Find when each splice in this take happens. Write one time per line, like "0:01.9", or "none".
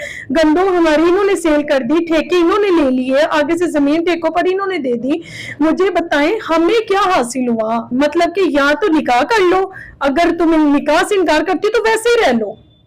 0:07.9